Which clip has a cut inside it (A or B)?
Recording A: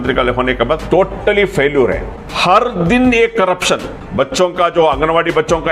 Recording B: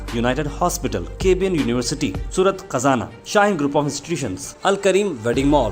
A